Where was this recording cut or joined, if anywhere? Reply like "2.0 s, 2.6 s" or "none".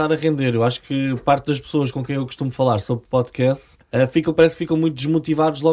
3.7 s